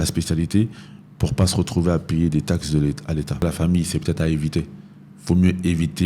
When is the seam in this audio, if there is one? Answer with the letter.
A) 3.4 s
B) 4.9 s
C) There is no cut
A